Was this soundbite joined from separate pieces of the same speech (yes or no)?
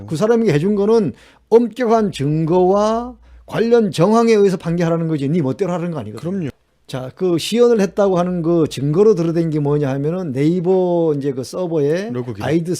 yes